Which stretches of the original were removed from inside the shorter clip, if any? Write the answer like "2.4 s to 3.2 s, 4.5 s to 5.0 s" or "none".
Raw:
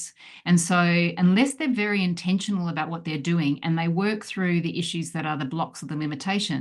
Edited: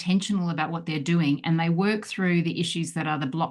none